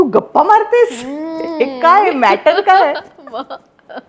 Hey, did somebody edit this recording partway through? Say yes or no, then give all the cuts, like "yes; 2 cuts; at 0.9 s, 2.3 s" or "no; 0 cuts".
no; 0 cuts